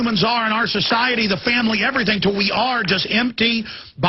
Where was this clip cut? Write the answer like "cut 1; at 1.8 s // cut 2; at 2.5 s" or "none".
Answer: cut 1; at 1.3 s